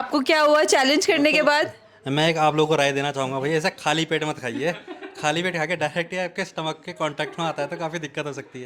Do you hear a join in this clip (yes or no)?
no